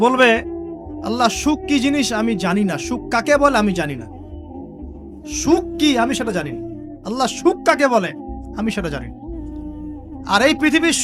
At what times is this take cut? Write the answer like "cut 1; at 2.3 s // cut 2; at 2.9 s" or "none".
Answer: cut 1; at 9.0 s // cut 2; at 10.3 s

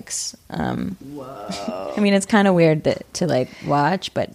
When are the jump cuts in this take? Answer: cut 1; at 1.8 s

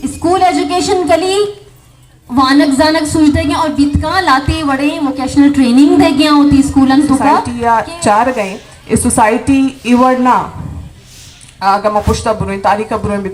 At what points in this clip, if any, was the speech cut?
cut 1; at 7.5 s

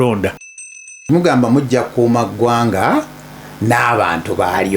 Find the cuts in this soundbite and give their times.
cut 1; at 1.0 s

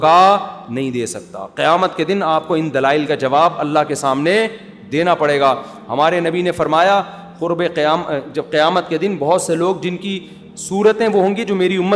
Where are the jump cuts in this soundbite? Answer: none

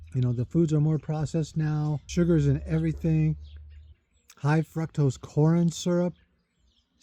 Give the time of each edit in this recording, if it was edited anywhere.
cut 1; at 2.0 s

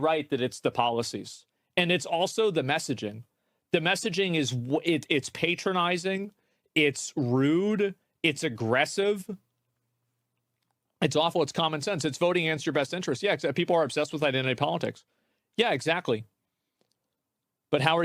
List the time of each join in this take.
cut 1; at 11.8 s

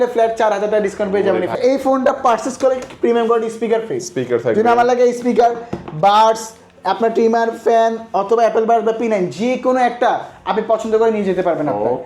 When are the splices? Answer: cut 1; at 1.6 s

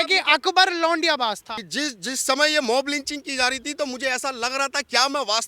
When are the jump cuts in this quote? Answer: cut 1; at 1.5 s

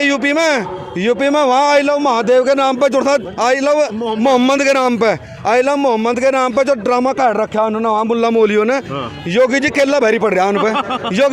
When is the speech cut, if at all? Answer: none

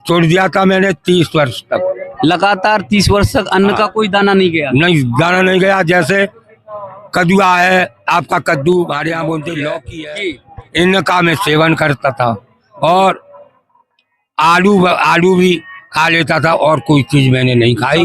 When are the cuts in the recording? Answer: cut 1; at 9.9 s

